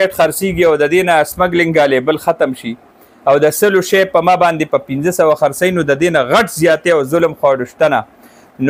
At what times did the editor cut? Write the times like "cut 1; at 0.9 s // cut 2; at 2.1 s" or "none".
none